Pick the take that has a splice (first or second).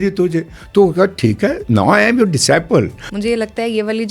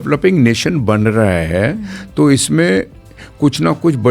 first